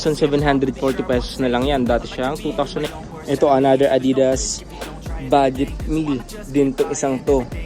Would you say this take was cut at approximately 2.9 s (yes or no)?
yes